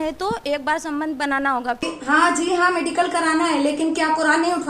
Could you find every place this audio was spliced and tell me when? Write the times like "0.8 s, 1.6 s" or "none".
1.8 s